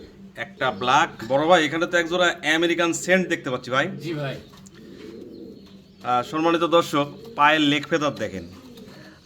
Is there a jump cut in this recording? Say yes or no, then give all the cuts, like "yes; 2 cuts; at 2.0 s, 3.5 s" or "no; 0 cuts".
yes; 1 cut; at 1.2 s